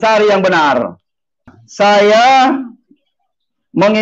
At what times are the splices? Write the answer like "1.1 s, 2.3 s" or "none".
1.6 s